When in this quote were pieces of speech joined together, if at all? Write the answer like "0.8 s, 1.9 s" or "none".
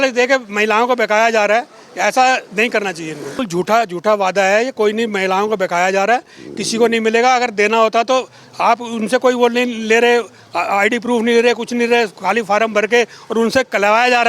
3.4 s